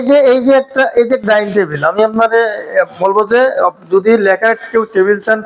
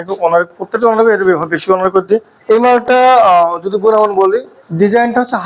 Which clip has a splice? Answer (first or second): second